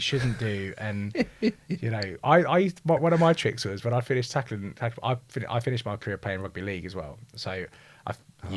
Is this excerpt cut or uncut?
uncut